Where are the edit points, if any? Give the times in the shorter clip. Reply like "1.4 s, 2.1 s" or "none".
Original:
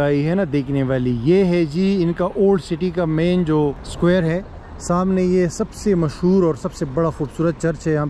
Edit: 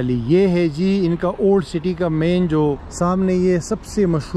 2.9 s